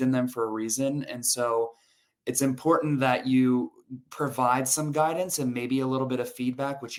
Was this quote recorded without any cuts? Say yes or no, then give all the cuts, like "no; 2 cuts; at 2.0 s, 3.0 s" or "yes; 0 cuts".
yes; 0 cuts